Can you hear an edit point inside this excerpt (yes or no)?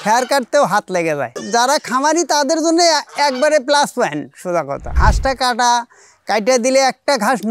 yes